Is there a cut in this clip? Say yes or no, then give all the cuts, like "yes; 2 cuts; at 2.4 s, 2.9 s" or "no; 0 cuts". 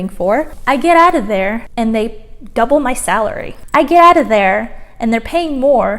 yes; 2 cuts; at 1.7 s, 3.5 s